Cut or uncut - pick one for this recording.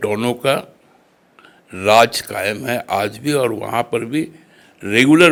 uncut